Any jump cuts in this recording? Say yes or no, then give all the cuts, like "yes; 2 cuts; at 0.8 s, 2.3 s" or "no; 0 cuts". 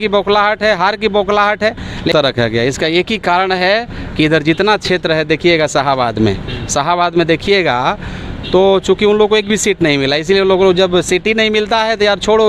yes; 1 cut; at 2.1 s